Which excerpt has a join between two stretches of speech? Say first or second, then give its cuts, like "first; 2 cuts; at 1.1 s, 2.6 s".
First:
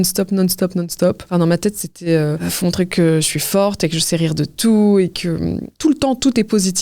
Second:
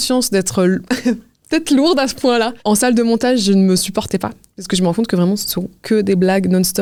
first; 3 cuts; at 1.2 s, 2.4 s, 5.7 s